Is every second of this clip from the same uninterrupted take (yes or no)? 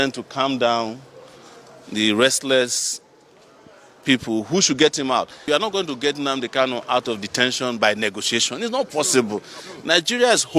no